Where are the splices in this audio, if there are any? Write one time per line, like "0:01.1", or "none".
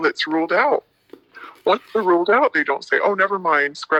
none